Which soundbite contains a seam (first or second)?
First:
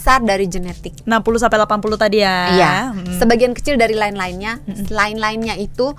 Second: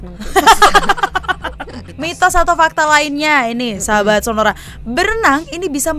second